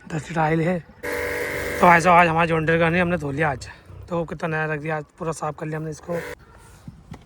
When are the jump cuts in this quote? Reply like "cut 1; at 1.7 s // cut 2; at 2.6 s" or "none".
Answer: cut 1; at 0.9 s // cut 2; at 6.3 s